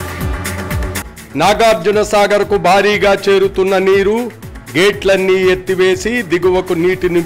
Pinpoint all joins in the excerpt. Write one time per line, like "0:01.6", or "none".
none